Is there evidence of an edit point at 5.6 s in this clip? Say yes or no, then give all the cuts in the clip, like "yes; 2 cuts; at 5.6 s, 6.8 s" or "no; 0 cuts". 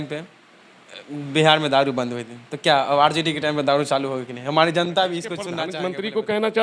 yes; 1 cut; at 5.6 s